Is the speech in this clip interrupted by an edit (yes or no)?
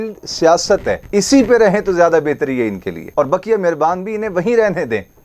no